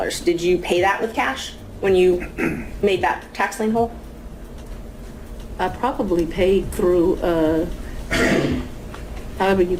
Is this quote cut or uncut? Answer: uncut